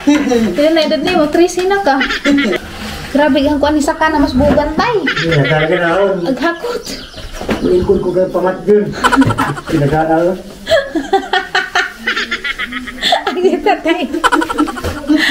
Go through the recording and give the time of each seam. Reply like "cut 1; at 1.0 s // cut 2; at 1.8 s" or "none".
cut 1; at 2.6 s